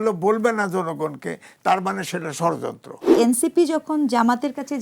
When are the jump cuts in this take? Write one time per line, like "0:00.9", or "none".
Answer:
0:03.1

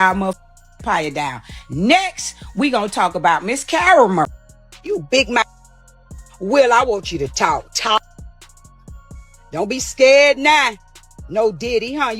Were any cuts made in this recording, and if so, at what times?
0:04.7

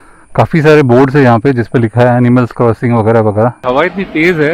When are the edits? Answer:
0:03.6

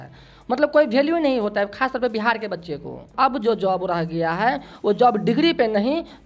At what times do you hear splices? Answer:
0:03.1

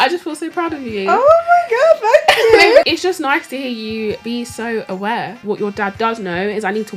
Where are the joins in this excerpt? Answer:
0:02.8
0:04.2
0:05.4

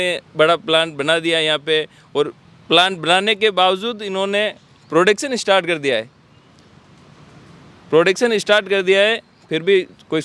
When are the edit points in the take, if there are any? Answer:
none

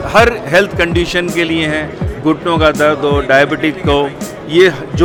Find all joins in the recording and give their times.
none

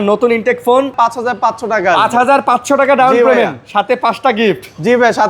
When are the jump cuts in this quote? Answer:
0:00.9

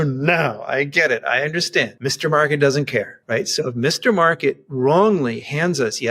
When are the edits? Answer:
0:01.9
0:03.2

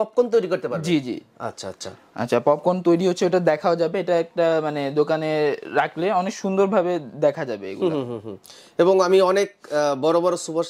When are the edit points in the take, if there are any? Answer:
none

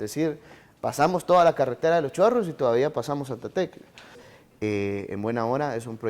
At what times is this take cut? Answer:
0:04.3

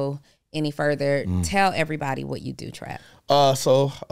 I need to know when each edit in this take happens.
none

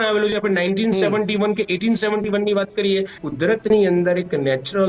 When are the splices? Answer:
0:03.2

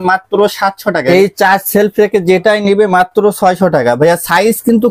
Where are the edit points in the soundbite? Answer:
0:01.0

